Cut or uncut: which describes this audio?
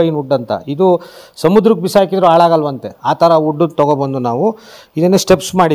uncut